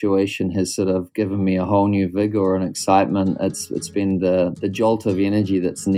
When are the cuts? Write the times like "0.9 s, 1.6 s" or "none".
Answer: 4.6 s